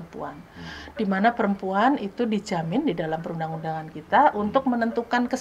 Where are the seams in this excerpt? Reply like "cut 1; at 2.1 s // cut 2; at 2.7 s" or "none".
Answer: none